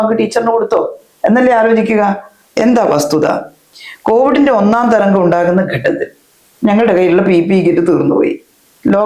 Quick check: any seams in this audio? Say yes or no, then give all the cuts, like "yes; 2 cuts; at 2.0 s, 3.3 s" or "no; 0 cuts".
no; 0 cuts